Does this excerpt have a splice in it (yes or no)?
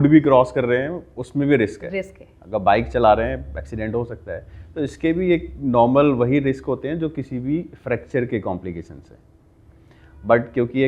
no